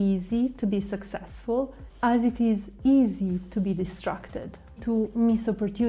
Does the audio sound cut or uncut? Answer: cut